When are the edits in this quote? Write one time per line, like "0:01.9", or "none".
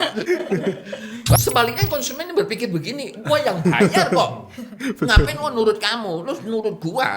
0:01.4